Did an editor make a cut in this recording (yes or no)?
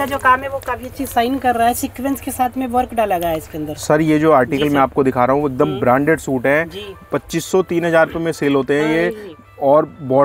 no